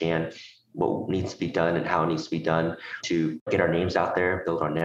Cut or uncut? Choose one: cut